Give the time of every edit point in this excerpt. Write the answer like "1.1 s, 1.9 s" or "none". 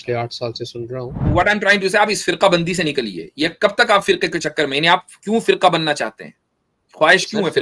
1.2 s